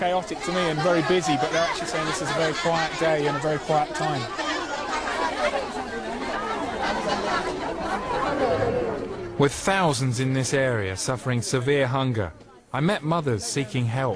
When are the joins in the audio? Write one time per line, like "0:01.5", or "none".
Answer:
0:04.8